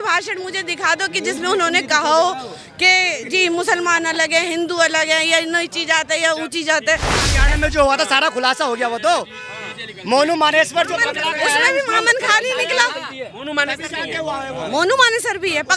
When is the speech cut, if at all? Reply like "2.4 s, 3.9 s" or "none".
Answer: 7.3 s